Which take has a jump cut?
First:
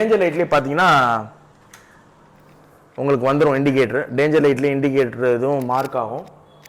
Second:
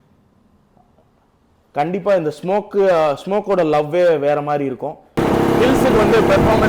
second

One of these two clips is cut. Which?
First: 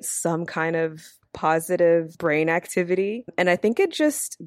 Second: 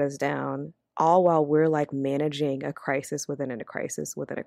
first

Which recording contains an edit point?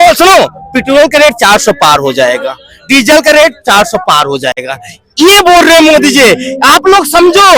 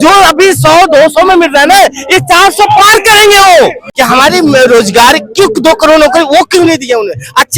second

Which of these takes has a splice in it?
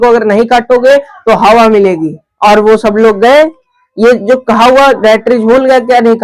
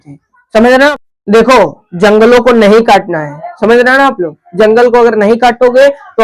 second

